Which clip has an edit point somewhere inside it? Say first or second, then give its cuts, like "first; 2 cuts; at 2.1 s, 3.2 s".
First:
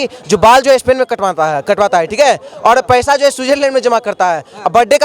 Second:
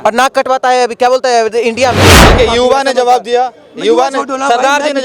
second; 1 cut; at 2.2 s